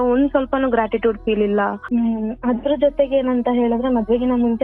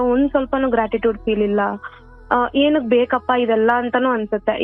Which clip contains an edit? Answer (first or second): first